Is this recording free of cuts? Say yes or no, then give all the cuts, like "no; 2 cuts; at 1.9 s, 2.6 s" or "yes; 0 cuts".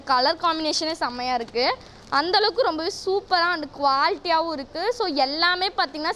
yes; 0 cuts